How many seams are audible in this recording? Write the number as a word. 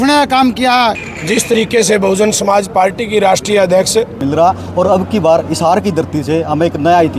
two